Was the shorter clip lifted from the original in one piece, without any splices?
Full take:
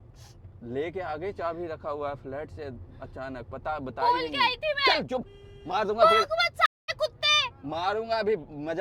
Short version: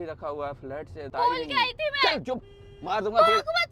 no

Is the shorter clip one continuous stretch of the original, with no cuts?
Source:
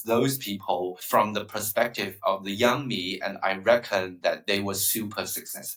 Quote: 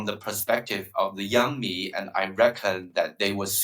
yes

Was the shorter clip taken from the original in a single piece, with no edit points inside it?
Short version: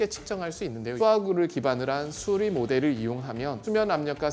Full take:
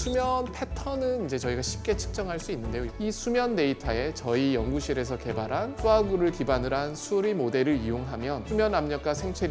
no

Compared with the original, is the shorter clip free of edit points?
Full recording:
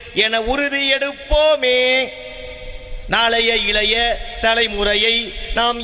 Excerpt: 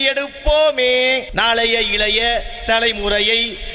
no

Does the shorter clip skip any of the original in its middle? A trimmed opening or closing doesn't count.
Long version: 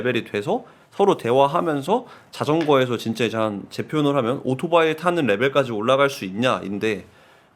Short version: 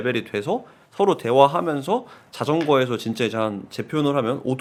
no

